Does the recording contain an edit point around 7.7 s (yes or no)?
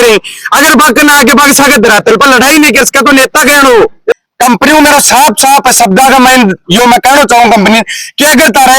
no